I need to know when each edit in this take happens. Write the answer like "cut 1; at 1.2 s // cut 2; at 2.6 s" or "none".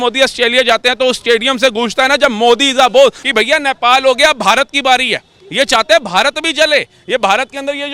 cut 1; at 3.2 s